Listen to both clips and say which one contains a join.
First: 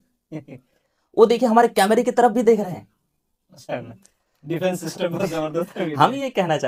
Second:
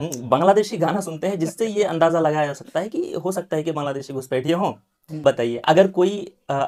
second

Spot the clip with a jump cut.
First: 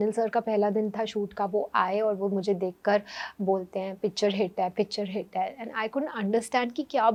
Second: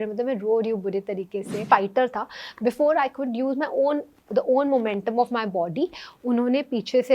second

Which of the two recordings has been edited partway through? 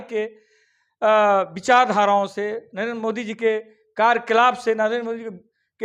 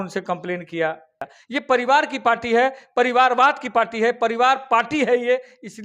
second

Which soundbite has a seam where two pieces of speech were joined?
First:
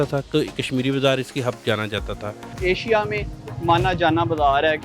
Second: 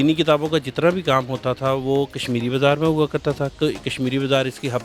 first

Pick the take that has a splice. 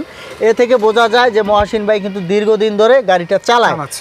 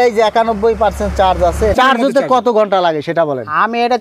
second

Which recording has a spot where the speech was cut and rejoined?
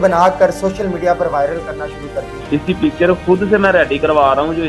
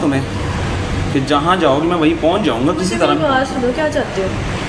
first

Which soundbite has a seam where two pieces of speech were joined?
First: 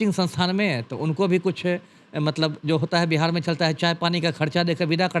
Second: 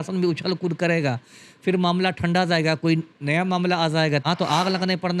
second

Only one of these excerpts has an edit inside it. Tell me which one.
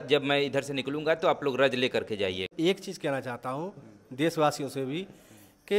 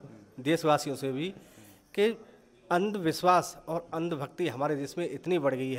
first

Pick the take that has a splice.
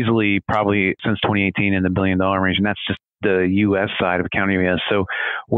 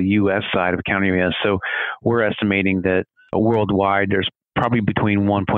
second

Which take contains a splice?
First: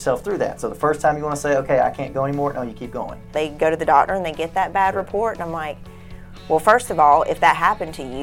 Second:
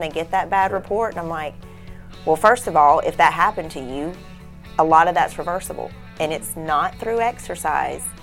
first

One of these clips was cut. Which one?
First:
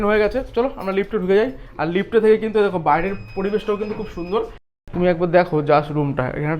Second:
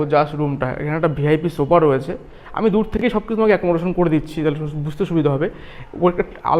first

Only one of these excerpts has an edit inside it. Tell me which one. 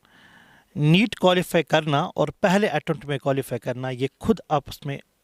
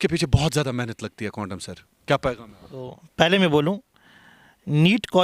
second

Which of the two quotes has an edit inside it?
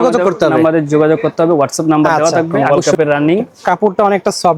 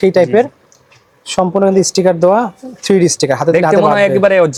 first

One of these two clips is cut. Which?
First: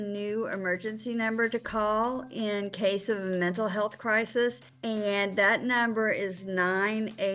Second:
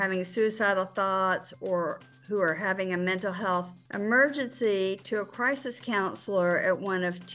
first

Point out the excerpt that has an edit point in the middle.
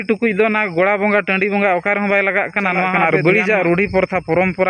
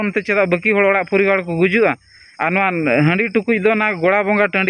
first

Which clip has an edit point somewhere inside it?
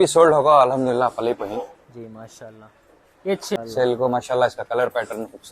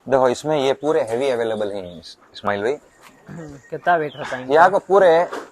first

